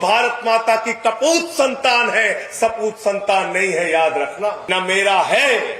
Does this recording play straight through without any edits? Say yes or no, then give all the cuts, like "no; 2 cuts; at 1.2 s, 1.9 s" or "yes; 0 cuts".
no; 1 cut; at 4.6 s